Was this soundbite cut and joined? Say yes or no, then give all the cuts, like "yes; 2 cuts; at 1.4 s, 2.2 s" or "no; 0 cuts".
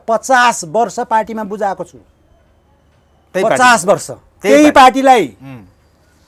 no; 0 cuts